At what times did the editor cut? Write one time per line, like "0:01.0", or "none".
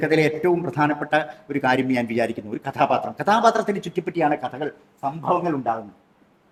none